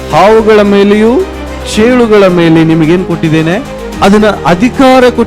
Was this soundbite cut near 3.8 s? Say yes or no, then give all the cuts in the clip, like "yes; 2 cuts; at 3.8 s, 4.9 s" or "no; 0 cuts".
yes; 1 cut; at 3.8 s